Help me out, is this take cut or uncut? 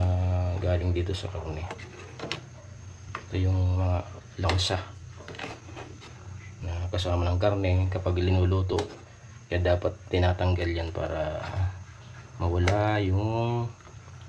uncut